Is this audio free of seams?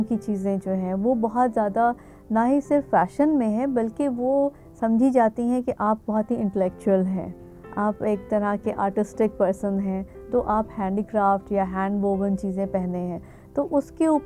yes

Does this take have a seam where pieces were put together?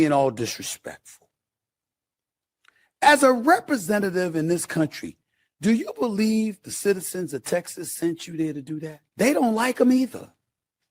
yes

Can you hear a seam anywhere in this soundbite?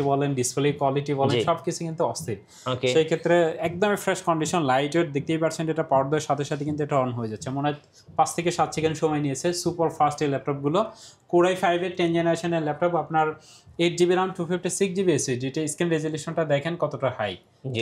no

